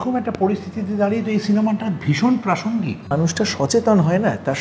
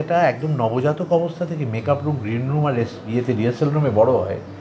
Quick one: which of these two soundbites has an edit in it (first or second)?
first